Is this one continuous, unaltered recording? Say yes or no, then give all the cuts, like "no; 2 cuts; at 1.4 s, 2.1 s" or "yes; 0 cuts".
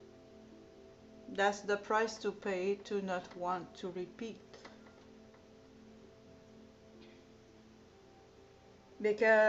yes; 0 cuts